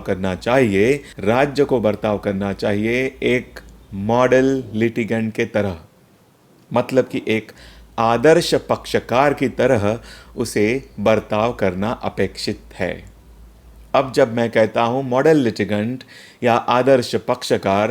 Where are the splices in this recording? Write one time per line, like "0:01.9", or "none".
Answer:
0:01.1